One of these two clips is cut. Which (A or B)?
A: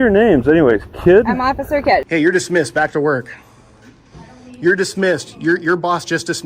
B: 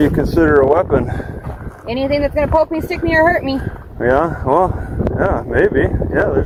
A